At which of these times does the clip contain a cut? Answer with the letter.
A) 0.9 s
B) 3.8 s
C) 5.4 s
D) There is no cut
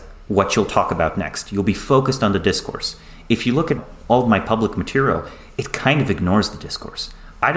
B